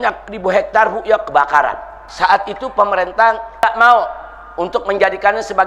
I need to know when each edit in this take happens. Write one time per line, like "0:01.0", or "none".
0:02.0
0:03.6